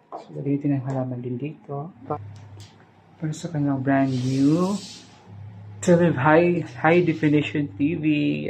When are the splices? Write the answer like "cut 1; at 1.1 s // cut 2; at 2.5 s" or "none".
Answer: cut 1; at 2.2 s